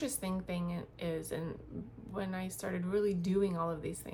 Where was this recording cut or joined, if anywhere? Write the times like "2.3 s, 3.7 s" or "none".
none